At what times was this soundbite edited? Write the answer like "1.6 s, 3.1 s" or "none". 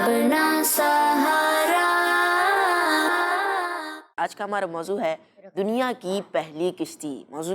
4.1 s